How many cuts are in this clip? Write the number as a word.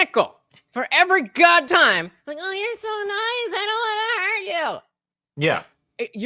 one